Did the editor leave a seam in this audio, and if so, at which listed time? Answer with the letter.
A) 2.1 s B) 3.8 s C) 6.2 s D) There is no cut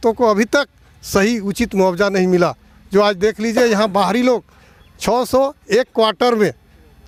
D